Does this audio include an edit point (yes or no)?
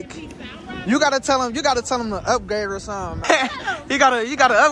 yes